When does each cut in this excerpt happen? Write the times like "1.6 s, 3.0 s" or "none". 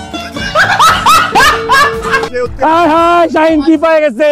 2.3 s